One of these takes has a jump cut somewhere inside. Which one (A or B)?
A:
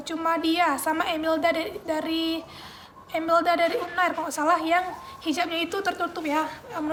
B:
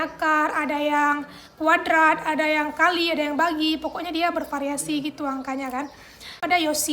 B